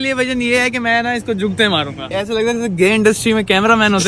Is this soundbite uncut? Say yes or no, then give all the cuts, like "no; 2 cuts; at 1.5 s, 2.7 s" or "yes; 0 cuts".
no; 1 cut; at 2.1 s